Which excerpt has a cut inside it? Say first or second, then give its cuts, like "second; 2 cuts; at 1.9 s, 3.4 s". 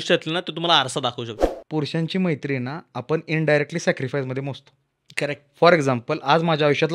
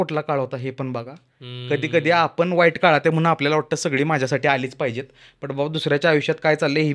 first; 1 cut; at 1.4 s